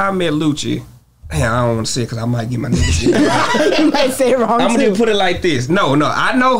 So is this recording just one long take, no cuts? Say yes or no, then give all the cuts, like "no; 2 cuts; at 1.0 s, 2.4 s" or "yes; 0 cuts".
yes; 0 cuts